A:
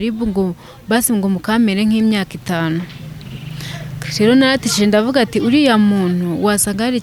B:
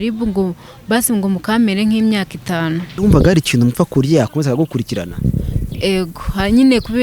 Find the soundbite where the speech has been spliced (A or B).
B